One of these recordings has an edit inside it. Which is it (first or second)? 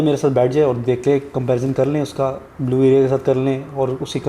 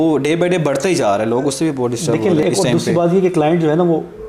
second